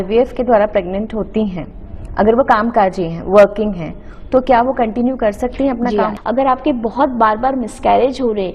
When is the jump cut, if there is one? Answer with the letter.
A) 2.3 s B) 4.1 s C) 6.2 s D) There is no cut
C